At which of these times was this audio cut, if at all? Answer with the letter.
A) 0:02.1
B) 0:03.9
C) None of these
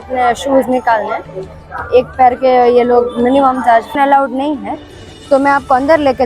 B